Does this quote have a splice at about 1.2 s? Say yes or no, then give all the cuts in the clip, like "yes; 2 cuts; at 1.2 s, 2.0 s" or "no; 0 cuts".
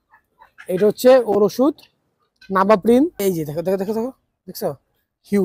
no; 1 cut; at 3.2 s